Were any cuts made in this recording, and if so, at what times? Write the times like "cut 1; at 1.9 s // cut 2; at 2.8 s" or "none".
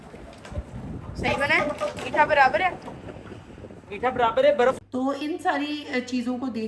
cut 1; at 4.8 s